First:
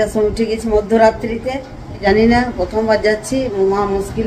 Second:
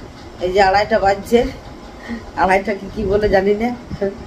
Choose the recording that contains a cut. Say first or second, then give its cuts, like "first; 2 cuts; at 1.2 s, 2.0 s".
first; 1 cut; at 2.0 s